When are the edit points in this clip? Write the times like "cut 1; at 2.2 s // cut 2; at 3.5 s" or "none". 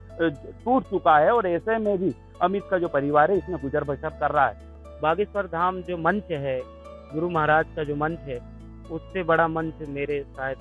cut 1; at 4.8 s

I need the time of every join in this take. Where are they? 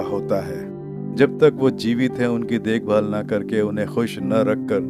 cut 1; at 1.1 s

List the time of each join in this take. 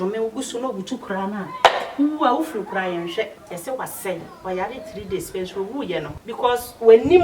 cut 1; at 3.4 s // cut 2; at 6.2 s

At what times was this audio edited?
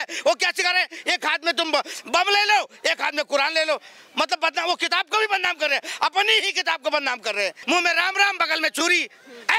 cut 1; at 7.6 s

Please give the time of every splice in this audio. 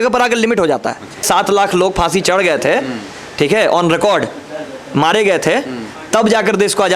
cut 1; at 1.2 s

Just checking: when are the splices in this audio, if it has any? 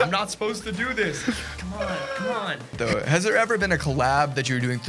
cut 1; at 2.8 s

